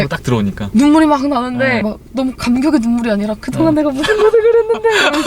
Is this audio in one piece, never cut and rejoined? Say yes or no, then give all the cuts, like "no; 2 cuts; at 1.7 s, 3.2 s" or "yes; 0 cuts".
no; 1 cut; at 1.8 s